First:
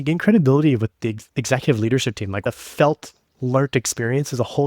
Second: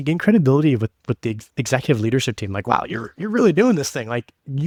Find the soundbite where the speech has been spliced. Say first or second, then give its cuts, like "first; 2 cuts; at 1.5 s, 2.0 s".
first; 2 cuts; at 1.0 s, 2.4 s